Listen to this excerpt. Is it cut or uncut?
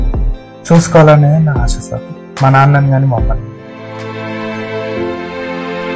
cut